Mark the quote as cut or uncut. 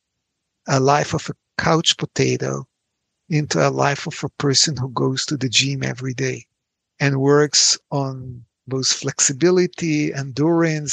uncut